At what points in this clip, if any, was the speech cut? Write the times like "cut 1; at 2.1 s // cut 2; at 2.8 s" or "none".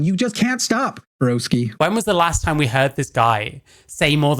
cut 1; at 1.3 s